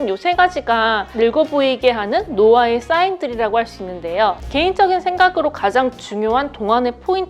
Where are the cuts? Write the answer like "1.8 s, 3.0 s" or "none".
1.1 s, 4.4 s